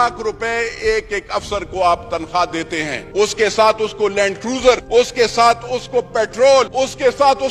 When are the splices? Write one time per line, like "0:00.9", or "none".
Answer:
0:03.0
0:04.8
0:06.7